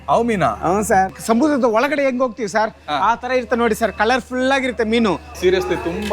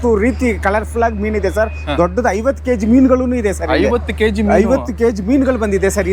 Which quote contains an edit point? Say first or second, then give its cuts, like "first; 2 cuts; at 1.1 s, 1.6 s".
first; 2 cuts; at 1.2 s, 5.4 s